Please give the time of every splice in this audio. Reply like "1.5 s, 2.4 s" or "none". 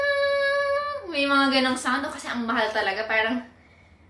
none